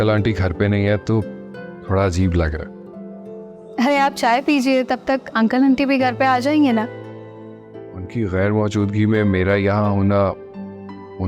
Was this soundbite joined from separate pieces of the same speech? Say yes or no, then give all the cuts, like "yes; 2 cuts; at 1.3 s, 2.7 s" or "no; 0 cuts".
no; 0 cuts